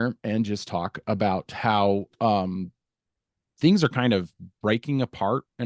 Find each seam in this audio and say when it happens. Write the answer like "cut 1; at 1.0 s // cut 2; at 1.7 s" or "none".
none